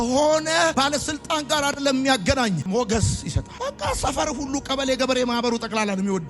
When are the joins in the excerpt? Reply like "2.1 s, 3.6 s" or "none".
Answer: none

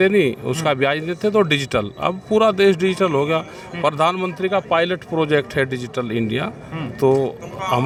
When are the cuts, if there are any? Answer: none

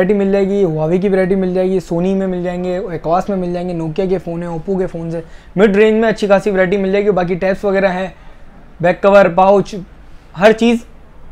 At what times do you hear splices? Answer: none

